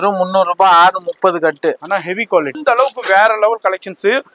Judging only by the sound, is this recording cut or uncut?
cut